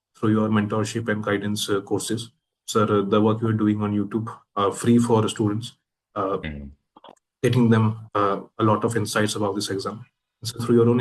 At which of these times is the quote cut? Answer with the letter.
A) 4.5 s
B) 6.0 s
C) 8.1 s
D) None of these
D